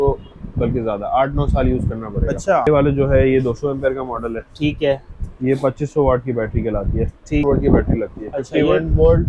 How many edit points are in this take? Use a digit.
2